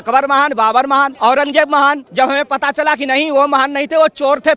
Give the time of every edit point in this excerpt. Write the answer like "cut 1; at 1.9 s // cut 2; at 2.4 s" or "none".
cut 1; at 1.1 s // cut 2; at 2.0 s